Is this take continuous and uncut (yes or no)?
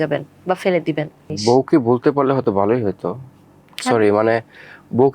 yes